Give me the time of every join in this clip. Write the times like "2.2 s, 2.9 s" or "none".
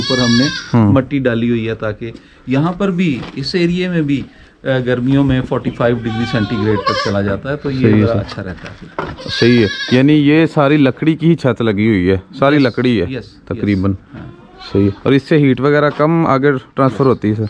none